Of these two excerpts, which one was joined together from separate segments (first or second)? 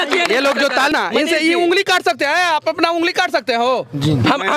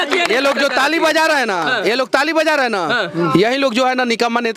first